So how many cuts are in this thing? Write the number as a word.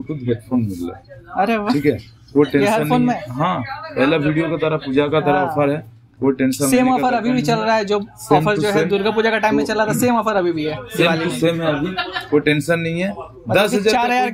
zero